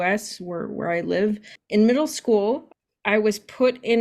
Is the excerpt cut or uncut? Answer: cut